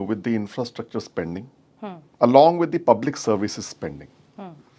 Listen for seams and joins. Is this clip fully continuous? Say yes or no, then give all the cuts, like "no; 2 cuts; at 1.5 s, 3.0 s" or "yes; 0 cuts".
no; 1 cut; at 2.0 s